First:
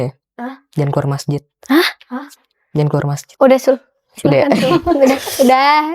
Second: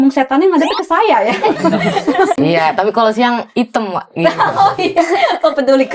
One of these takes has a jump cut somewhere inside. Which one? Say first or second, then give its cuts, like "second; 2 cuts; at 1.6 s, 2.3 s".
second; 1 cut; at 2.4 s